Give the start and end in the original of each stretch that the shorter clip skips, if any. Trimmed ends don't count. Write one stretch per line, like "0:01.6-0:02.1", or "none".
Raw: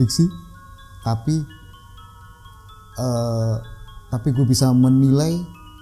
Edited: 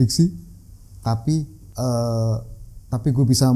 0:01.6-0:02.8